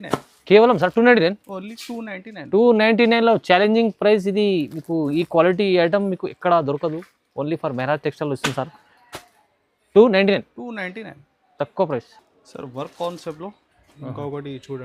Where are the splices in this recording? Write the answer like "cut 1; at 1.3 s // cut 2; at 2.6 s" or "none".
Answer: none

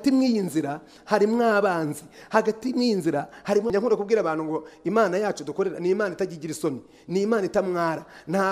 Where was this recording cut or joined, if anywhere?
cut 1; at 3.7 s

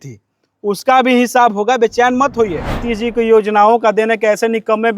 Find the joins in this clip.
cut 1; at 2.9 s

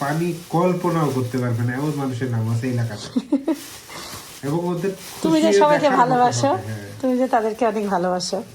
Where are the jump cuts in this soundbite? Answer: none

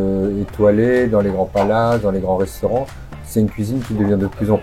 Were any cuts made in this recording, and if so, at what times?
none

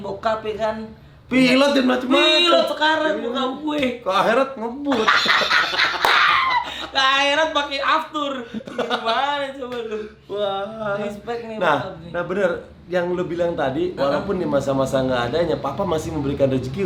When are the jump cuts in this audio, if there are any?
none

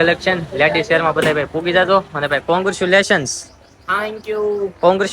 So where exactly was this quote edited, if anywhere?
none

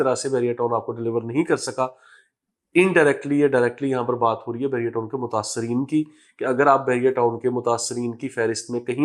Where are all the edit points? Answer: none

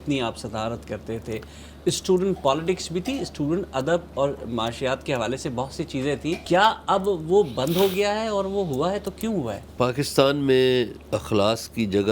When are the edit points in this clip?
cut 1; at 6.4 s // cut 2; at 9.7 s // cut 3; at 11.0 s

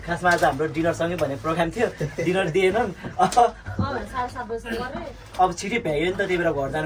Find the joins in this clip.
none

